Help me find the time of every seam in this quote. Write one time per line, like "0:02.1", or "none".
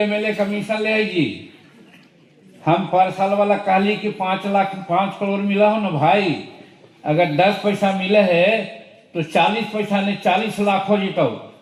none